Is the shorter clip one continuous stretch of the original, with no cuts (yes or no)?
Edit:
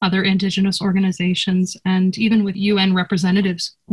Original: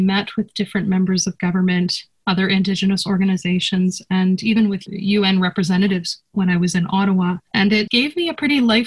no